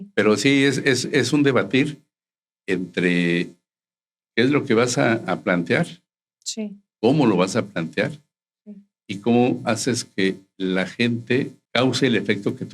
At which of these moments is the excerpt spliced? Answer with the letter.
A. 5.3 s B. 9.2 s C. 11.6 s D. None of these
C